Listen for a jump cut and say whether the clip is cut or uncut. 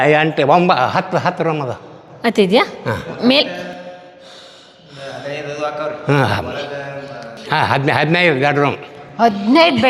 uncut